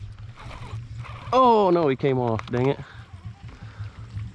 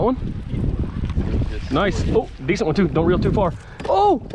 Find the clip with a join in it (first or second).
second